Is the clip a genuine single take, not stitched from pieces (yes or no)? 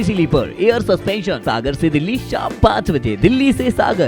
no